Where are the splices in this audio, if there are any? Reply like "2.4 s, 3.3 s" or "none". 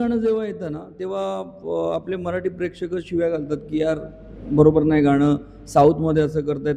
none